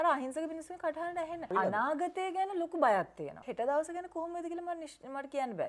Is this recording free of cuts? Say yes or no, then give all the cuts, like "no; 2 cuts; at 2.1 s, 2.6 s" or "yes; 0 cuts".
no; 2 cuts; at 1.5 s, 3.4 s